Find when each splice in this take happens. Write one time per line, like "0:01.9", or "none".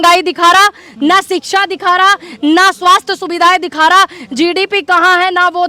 none